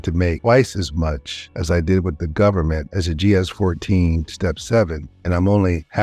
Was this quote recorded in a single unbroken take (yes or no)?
yes